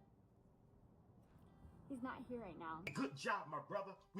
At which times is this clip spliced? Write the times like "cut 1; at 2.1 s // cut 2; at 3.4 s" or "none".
cut 1; at 2.9 s